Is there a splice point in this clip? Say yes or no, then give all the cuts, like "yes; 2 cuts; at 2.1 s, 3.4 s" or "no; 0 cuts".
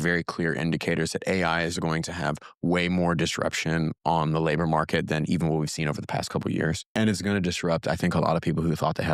no; 0 cuts